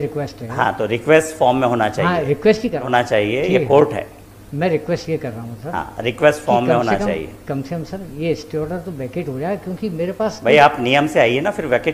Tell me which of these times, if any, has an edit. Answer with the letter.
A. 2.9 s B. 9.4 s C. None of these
A